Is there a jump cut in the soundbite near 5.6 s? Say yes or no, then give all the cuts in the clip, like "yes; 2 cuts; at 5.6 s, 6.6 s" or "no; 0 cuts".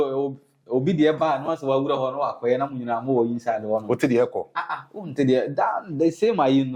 no; 0 cuts